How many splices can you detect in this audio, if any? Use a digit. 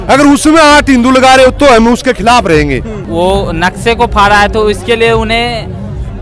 1